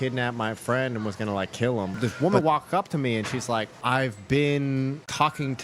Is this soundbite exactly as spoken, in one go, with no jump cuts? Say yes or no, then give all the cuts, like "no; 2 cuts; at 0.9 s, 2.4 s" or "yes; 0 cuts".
no; 2 cuts; at 2.0 s, 3.8 s